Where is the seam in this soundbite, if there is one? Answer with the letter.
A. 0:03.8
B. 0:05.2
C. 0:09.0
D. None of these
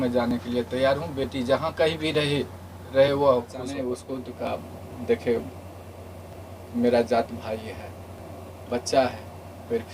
A